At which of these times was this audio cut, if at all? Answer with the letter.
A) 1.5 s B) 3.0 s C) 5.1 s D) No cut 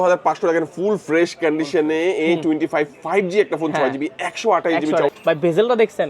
C